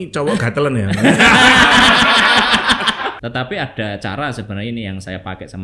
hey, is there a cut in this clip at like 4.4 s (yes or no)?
no